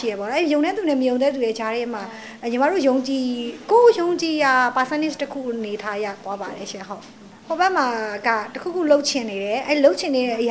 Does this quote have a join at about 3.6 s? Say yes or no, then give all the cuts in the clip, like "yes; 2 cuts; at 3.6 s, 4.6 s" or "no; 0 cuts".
no; 1 cut; at 7.3 s